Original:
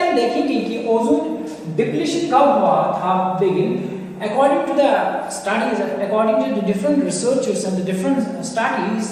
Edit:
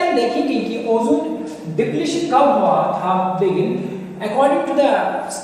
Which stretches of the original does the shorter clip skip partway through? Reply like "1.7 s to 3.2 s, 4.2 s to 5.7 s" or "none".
none